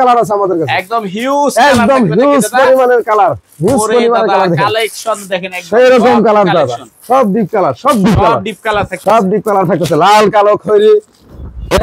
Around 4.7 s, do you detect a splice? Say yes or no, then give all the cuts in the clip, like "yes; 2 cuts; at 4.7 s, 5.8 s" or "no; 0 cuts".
no; 0 cuts